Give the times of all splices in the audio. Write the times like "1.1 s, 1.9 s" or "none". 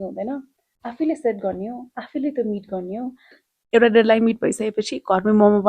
3.4 s